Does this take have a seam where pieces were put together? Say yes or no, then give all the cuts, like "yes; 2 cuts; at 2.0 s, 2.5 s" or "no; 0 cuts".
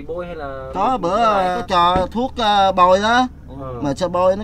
yes; 1 cut; at 1.6 s